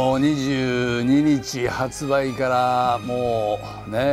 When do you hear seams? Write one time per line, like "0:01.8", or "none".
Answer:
none